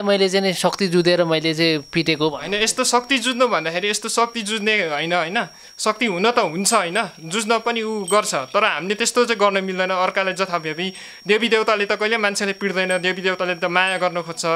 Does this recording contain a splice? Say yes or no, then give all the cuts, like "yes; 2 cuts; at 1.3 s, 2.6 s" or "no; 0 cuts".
no; 0 cuts